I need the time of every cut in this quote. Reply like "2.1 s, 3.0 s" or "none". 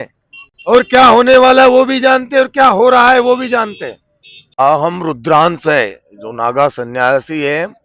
4.6 s